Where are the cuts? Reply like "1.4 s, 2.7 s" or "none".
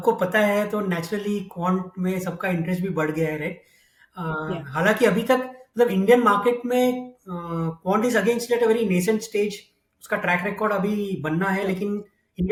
none